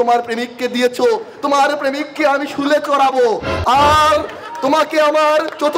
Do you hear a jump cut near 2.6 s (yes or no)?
no